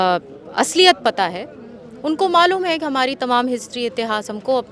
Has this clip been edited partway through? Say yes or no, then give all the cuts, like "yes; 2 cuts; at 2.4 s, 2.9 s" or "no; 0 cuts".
no; 0 cuts